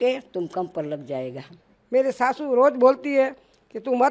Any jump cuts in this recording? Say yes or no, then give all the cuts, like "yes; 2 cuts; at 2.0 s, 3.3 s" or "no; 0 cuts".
yes; 1 cut; at 1.7 s